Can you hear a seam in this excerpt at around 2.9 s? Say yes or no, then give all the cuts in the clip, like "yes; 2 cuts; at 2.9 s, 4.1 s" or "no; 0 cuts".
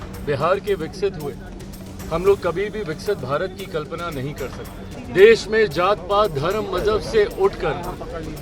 no; 1 cut; at 4.9 s